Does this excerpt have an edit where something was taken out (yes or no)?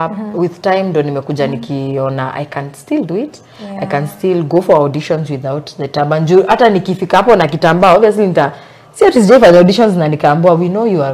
no